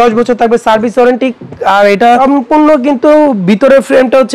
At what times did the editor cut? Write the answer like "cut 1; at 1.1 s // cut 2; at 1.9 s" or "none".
none